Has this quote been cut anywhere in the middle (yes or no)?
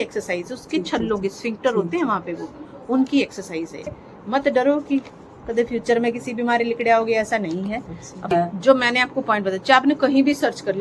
yes